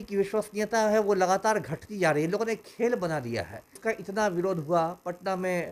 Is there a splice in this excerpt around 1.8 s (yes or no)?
no